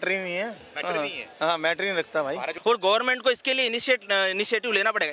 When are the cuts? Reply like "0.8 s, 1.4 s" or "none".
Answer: 2.5 s